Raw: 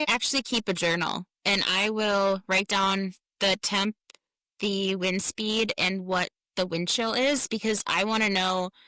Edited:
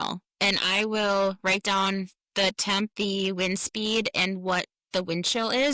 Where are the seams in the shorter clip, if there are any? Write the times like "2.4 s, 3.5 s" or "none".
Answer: 2.9 s